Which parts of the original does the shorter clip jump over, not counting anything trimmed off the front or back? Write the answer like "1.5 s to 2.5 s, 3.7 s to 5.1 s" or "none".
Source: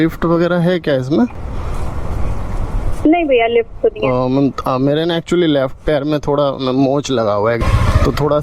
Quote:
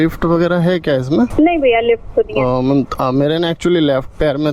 1.3 s to 3.0 s